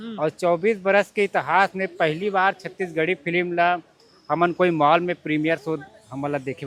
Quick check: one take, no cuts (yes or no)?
yes